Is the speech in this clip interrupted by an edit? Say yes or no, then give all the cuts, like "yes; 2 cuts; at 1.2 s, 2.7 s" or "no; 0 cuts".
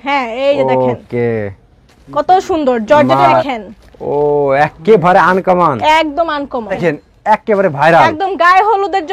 yes; 2 cuts; at 3.5 s, 6.8 s